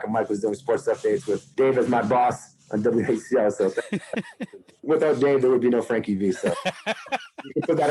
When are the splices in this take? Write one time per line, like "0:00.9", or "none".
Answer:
0:01.5
0:04.8